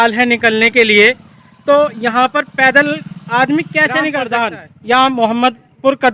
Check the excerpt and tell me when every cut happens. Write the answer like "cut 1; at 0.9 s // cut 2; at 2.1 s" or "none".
cut 1; at 4.2 s